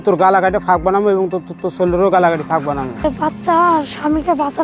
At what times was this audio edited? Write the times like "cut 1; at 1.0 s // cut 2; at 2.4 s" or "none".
cut 1; at 3.0 s